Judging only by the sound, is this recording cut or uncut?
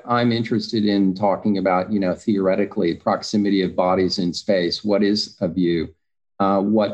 uncut